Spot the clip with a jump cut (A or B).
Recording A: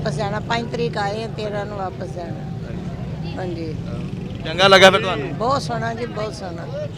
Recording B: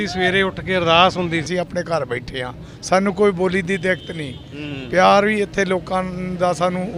B